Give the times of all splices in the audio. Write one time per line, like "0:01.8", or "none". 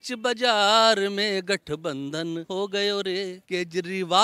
0:02.4
0:03.4